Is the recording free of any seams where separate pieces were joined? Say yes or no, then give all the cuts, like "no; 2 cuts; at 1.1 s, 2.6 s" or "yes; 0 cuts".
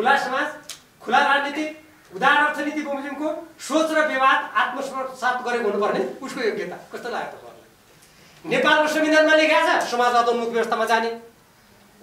yes; 0 cuts